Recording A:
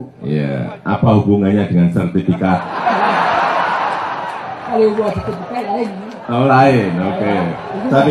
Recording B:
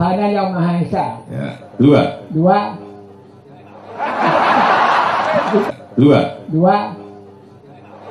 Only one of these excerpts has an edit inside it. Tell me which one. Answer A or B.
B